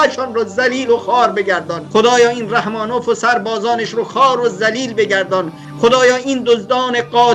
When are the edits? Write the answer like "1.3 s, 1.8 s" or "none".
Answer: 1.7 s